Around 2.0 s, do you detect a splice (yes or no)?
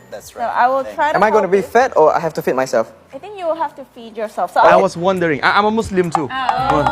no